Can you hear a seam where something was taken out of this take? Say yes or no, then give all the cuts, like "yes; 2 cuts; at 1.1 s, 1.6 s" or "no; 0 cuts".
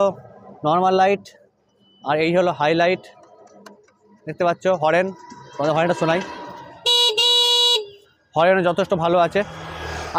no; 0 cuts